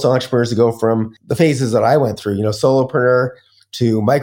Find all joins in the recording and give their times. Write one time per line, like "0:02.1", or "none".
0:01.2